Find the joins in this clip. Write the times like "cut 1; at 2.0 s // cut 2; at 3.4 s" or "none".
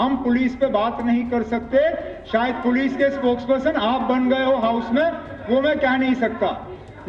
none